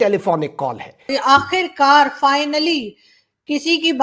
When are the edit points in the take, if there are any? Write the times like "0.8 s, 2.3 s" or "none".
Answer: 1.1 s